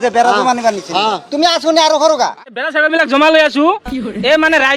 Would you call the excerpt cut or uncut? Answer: cut